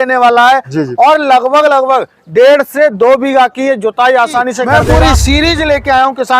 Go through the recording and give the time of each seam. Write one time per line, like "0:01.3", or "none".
0:04.7